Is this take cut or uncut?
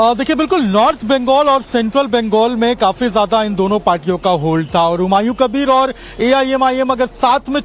cut